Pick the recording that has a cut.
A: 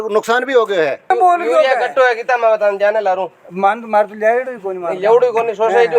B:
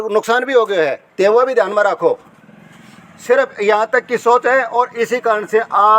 A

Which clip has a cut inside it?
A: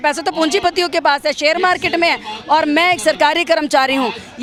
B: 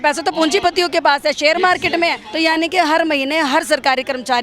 B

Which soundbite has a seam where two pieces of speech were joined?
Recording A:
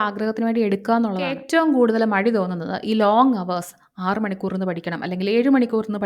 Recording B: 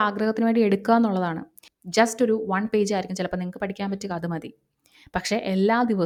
A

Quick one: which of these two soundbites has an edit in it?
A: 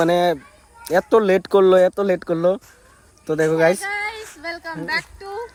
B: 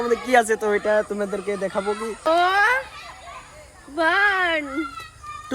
B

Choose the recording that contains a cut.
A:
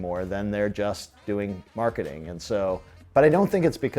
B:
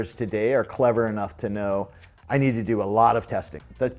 A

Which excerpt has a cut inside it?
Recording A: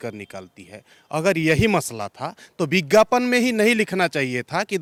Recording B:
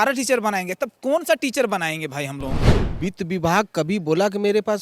B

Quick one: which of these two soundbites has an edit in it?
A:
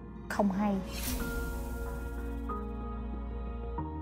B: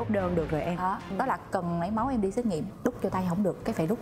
B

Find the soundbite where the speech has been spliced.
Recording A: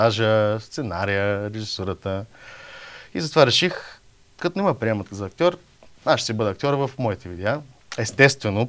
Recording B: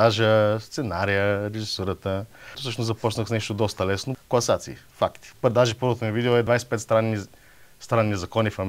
B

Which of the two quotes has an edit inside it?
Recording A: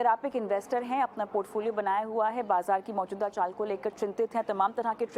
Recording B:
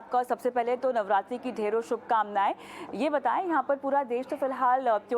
B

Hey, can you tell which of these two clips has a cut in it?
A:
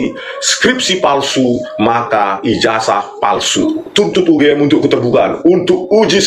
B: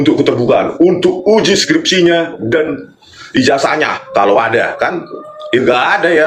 A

